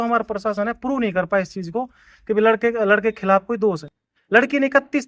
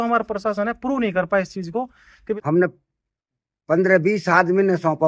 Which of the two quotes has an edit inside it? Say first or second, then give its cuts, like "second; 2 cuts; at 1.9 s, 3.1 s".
second; 1 cut; at 2.3 s